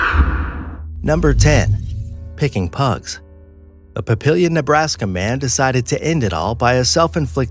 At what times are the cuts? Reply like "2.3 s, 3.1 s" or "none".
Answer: 6.3 s